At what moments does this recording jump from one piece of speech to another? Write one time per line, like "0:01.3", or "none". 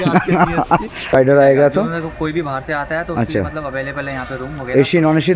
0:01.2